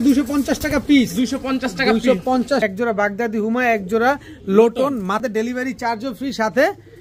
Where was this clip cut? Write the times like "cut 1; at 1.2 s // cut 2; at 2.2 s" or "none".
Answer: cut 1; at 2.6 s // cut 2; at 5.2 s